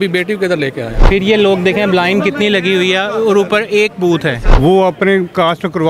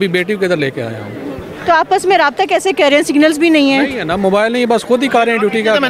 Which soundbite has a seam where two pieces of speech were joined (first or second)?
first